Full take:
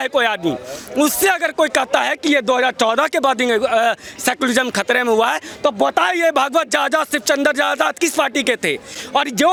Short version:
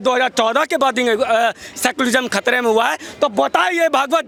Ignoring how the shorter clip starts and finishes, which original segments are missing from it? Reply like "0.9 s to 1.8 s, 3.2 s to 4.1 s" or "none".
none